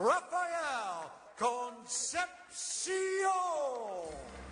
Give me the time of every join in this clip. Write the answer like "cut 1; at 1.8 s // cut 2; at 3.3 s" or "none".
cut 1; at 3.3 s

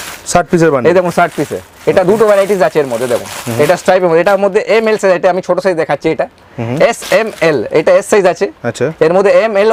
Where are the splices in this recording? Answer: none

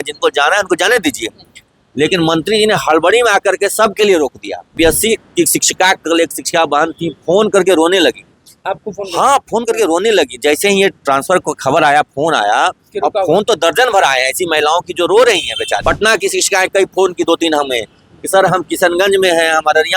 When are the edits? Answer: cut 1; at 4.7 s // cut 2; at 15.8 s

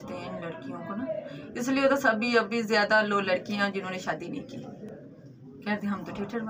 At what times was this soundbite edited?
none

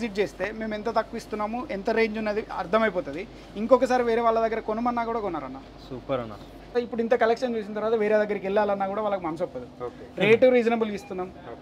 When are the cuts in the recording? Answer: cut 1; at 6.7 s

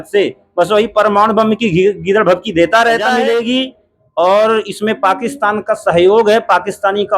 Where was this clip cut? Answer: cut 1; at 3.2 s

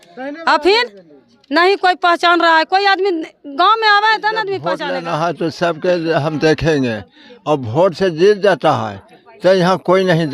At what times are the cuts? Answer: cut 1; at 4.7 s

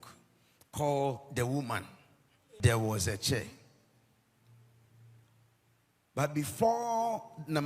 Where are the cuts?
cut 1; at 2.4 s

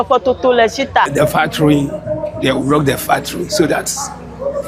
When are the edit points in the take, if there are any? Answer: cut 1; at 1.1 s

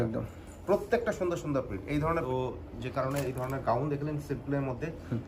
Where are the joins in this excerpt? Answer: cut 1; at 2.1 s

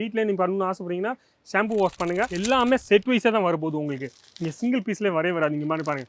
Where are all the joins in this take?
cut 1; at 2.3 s

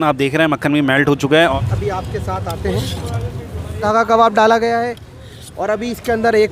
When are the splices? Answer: cut 1; at 1.5 s // cut 2; at 3.8 s

